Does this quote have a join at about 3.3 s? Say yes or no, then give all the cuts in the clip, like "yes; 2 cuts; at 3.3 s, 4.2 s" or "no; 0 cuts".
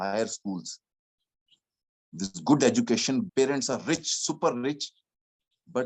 yes; 1 cut; at 3.3 s